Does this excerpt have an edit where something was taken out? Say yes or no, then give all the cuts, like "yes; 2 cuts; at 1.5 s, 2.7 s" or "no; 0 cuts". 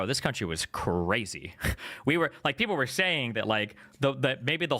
yes; 1 cut; at 1.7 s